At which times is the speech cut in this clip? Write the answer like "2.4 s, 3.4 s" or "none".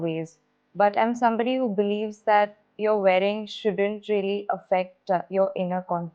2.5 s